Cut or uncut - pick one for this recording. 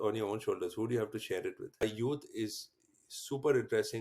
cut